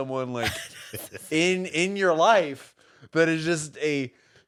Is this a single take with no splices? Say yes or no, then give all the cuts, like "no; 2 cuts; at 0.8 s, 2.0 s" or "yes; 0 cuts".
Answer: yes; 0 cuts